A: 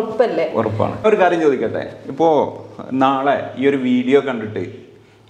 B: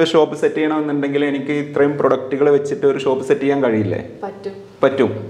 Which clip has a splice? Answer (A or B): A